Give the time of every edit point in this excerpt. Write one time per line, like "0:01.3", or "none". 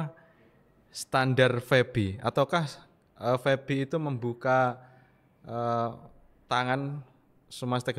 none